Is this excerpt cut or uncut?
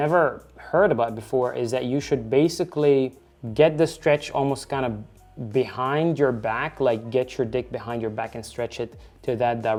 uncut